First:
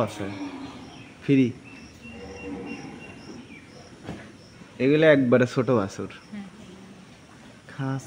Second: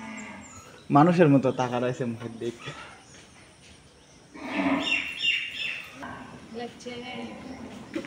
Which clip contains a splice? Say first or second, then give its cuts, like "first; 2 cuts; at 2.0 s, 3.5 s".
second; 1 cut; at 6.0 s